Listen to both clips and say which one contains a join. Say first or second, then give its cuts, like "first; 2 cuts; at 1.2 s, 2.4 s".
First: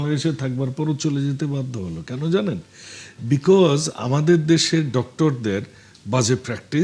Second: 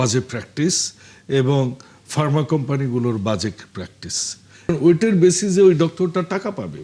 second; 1 cut; at 4.7 s